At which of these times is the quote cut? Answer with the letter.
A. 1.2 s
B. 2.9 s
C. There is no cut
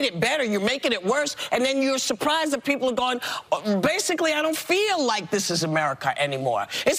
C